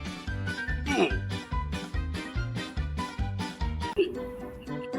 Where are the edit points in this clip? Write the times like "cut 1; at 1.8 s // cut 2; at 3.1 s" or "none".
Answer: cut 1; at 3.9 s